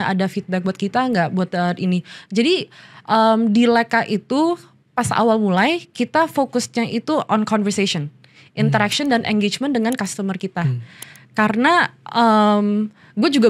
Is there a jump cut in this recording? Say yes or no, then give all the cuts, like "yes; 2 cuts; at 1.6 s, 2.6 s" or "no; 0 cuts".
no; 0 cuts